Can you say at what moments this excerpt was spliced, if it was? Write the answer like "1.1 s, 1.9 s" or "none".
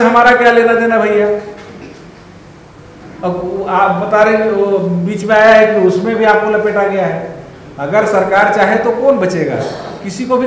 none